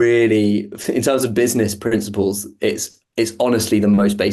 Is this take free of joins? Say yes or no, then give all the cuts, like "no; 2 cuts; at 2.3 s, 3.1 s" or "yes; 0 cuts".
yes; 0 cuts